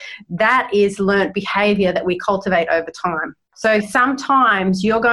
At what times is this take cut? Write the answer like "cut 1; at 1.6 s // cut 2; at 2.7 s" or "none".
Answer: cut 1; at 3.5 s